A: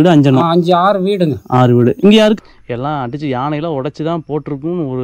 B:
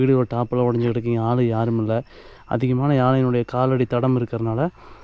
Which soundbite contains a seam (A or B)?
A